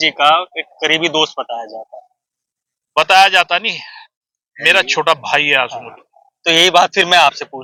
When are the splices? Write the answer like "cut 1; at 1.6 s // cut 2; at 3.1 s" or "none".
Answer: none